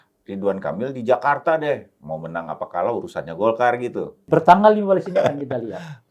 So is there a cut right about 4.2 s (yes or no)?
yes